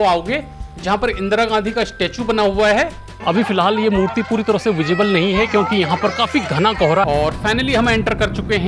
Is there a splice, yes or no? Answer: yes